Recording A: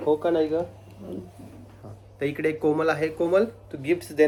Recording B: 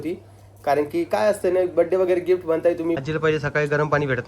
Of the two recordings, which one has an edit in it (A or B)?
B